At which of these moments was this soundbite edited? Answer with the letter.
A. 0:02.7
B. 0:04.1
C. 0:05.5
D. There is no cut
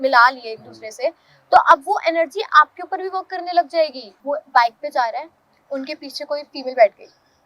B